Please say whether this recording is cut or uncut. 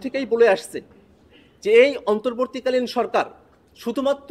uncut